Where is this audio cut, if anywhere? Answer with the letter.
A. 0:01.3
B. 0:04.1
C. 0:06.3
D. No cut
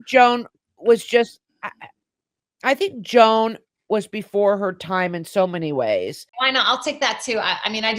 C